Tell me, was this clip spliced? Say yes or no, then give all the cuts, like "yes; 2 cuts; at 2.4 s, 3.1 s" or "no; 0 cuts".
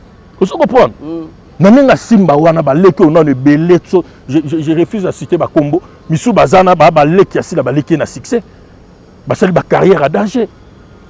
no; 0 cuts